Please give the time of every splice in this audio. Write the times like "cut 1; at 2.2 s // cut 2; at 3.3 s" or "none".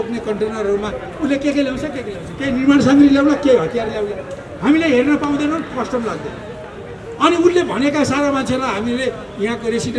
none